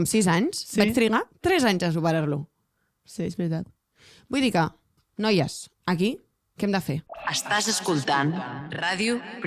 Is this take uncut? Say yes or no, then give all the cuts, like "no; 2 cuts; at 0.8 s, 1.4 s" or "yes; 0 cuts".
no; 1 cut; at 7.1 s